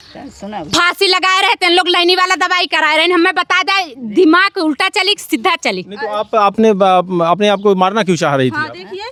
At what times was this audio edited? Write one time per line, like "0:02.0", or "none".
none